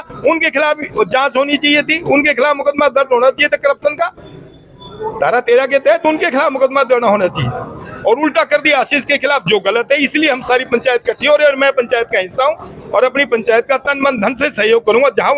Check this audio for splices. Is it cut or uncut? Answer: uncut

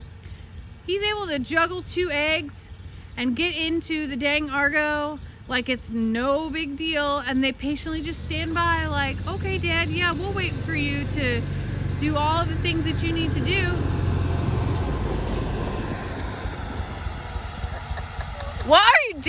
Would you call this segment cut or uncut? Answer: uncut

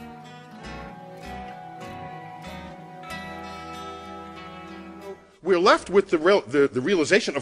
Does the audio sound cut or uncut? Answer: uncut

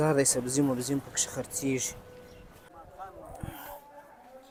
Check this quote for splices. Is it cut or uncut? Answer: uncut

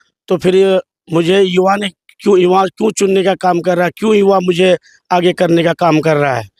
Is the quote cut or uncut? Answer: uncut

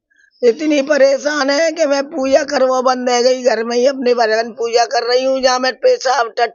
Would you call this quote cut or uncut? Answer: uncut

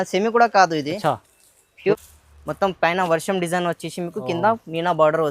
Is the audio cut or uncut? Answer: cut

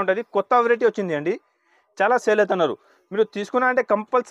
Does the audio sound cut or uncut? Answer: uncut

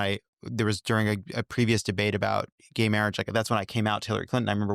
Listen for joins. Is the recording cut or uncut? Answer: uncut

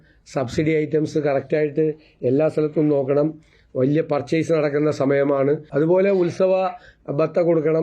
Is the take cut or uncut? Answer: cut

